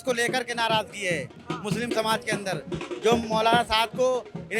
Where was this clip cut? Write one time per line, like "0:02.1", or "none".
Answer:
none